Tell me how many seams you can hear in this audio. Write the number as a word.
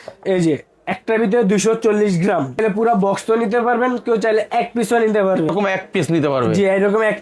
two